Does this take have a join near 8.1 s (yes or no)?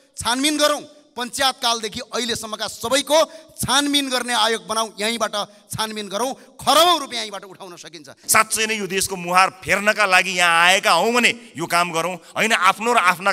yes